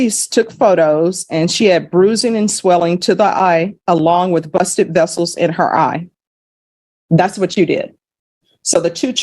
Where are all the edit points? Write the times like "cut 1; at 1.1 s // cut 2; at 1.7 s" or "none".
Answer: none